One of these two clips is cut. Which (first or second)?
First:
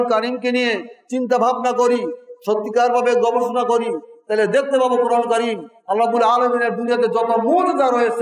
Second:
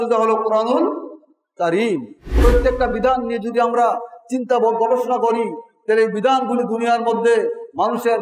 second